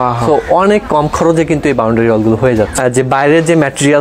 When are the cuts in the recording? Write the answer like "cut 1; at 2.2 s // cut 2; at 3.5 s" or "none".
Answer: cut 1; at 2.7 s